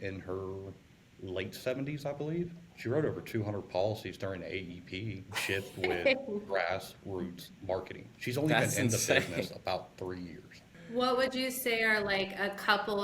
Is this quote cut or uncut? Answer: cut